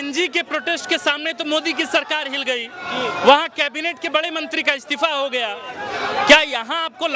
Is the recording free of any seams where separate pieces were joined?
yes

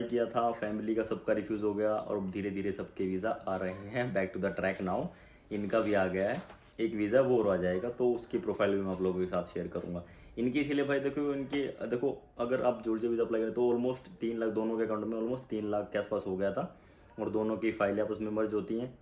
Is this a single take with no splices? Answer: yes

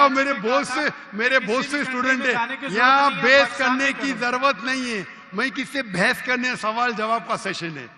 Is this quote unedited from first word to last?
yes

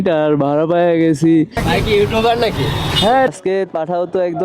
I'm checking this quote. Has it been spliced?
yes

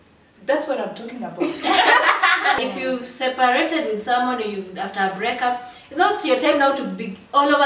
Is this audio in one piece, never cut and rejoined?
no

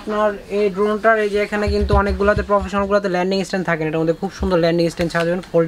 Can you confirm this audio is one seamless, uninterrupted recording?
yes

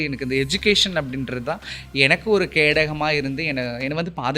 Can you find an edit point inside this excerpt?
no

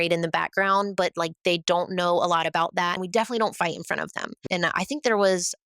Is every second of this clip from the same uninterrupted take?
no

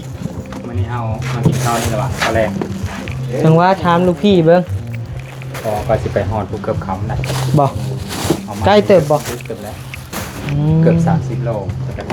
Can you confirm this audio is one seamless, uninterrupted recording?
yes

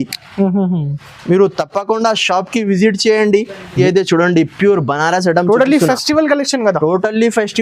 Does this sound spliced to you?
yes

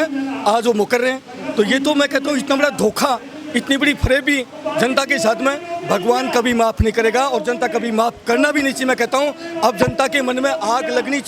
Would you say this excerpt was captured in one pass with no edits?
yes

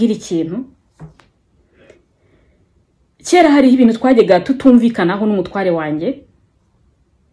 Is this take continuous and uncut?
yes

